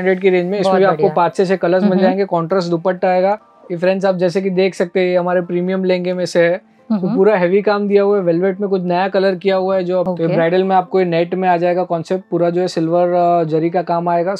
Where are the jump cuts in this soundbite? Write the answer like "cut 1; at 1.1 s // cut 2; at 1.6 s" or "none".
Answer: cut 1; at 3.5 s // cut 2; at 10.1 s

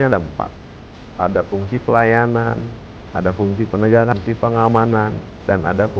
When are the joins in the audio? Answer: cut 1; at 4.1 s

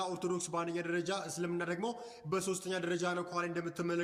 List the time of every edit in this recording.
none

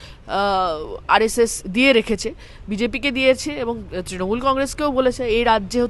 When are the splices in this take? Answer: none

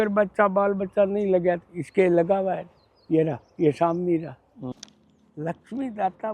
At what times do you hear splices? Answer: cut 1; at 4.7 s

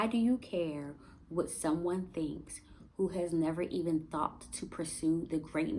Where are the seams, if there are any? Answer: none

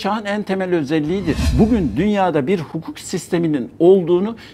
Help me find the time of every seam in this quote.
cut 1; at 1.4 s

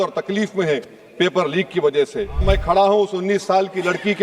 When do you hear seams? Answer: cut 1; at 2.4 s

